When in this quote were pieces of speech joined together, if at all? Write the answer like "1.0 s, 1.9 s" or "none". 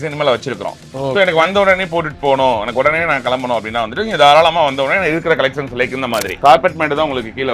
6.3 s